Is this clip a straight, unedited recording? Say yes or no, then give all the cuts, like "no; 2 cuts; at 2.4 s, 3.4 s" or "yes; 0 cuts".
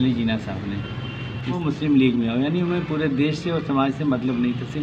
no; 1 cut; at 1.6 s